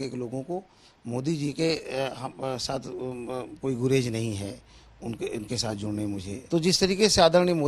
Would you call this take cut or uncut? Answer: cut